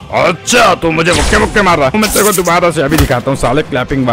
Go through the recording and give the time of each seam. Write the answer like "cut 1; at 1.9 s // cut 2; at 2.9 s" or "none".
cut 1; at 1.9 s